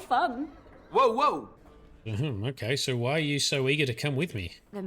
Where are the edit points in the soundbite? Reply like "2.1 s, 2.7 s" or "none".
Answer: 1.6 s